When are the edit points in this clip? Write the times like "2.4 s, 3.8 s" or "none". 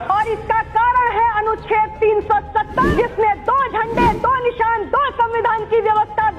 2.9 s